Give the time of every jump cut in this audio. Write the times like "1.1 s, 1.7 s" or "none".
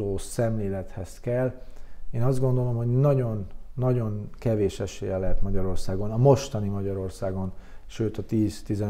none